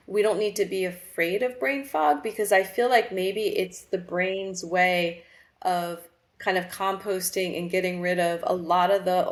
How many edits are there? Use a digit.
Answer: 0